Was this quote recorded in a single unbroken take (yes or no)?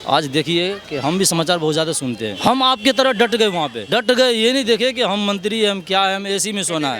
no